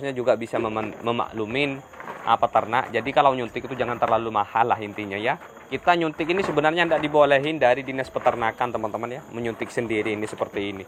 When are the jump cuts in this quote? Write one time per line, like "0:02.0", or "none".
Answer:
0:05.7